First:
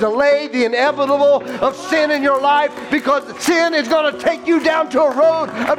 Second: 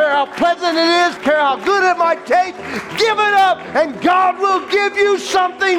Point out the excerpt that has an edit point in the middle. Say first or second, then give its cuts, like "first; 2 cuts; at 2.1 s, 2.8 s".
second; 1 cut; at 1.2 s